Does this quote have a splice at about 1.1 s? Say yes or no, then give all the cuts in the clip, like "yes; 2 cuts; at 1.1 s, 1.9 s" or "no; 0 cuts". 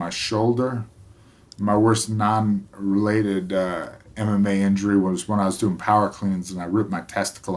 no; 0 cuts